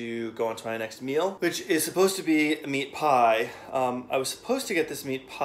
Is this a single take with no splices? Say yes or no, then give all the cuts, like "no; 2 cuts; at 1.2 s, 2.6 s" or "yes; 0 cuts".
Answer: no; 1 cut; at 1.4 s